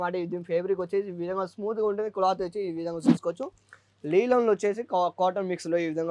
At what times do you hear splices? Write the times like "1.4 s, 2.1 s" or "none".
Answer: none